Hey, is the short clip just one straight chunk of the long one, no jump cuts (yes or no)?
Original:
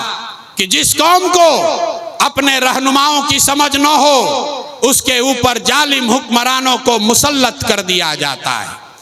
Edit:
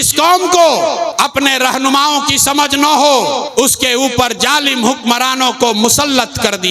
no